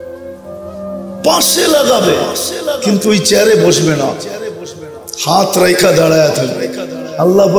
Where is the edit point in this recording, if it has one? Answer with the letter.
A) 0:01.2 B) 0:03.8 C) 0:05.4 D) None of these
D